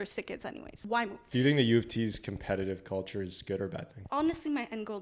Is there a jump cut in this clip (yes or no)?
yes